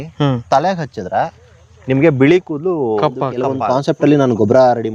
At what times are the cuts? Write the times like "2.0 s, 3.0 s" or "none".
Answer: 3.6 s